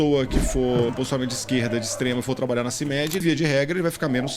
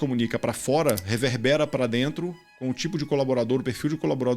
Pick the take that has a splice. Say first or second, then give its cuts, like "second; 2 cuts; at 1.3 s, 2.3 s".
first; 2 cuts; at 0.9 s, 3.2 s